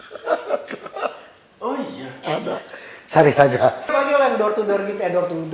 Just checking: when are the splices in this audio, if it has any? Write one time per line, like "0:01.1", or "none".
0:03.9